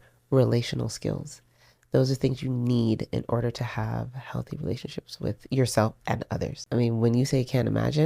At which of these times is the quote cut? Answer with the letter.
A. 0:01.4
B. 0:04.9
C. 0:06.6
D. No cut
C